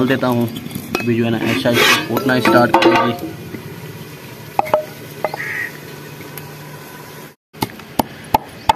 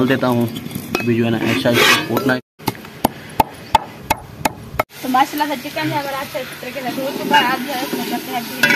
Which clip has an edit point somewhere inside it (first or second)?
second